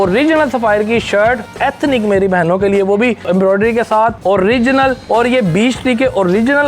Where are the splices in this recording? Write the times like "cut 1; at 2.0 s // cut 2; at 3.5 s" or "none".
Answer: cut 1; at 1.5 s // cut 2; at 3.2 s // cut 3; at 4.2 s // cut 4; at 5.0 s